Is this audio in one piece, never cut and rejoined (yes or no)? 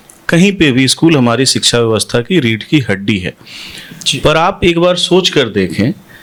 yes